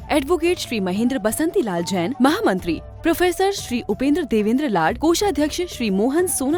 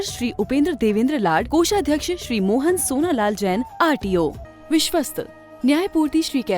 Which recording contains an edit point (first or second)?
second